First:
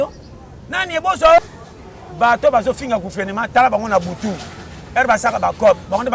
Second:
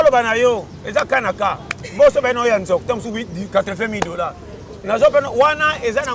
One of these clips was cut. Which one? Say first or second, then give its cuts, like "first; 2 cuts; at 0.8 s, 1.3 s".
first; 1 cut; at 1.4 s